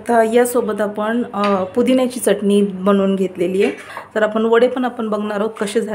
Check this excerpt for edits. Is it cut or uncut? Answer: cut